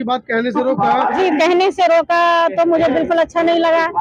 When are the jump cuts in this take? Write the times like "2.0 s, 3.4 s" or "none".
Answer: 1.1 s